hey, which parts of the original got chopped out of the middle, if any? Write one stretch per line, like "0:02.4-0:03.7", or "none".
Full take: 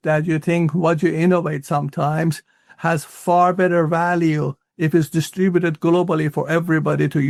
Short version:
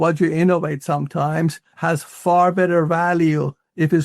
0:02.5-0:02.7